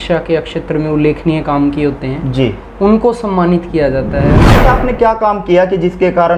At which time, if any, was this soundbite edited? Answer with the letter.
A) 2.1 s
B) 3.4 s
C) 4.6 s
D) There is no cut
C